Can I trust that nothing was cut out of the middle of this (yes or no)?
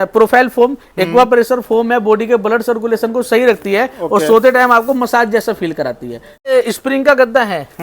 no